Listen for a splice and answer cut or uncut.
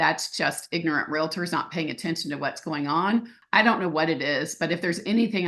cut